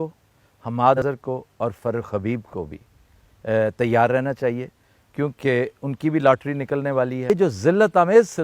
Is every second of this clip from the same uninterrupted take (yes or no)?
no